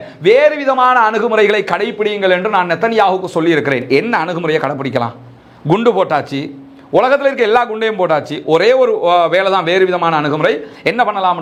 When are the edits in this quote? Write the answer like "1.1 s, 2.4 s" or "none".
none